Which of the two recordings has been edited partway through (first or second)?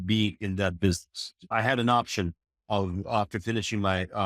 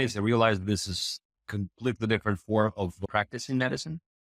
first